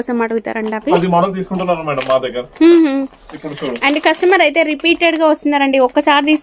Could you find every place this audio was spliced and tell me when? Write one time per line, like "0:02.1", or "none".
0:01.0